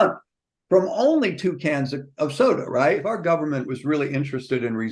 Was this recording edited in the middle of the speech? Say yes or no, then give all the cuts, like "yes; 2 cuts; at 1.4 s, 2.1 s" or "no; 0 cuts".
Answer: yes; 1 cut; at 3.1 s